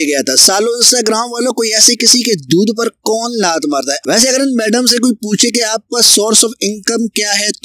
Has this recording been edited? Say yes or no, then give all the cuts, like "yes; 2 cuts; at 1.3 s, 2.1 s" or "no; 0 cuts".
yes; 1 cut; at 4.0 s